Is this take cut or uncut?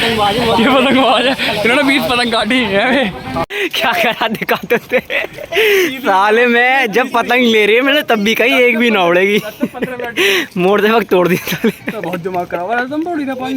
cut